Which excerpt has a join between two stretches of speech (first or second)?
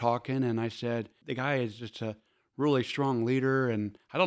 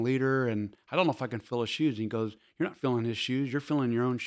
first